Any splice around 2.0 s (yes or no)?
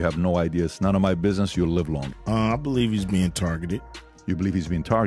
yes